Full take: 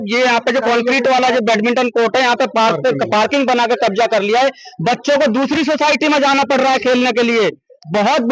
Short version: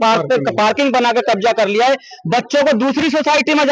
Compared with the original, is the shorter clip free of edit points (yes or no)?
yes